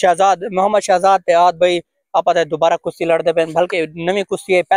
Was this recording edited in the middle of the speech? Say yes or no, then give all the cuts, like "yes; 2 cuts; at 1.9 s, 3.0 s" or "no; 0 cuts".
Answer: no; 0 cuts